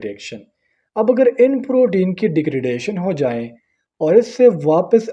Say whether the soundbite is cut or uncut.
uncut